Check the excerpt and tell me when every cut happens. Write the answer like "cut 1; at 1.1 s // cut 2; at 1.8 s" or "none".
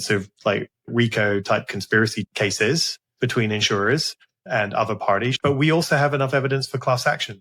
cut 1; at 2.2 s // cut 2; at 4.4 s // cut 3; at 5.4 s